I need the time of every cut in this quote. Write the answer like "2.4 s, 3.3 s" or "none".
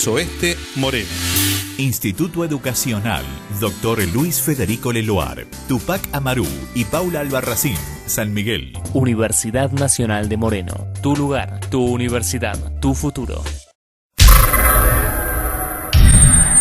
14.1 s

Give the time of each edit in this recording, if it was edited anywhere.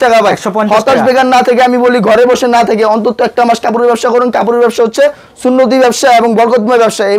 none

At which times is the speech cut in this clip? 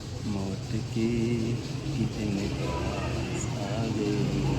none

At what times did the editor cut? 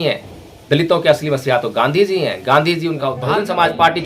3.1 s

